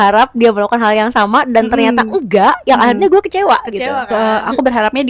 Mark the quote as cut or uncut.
cut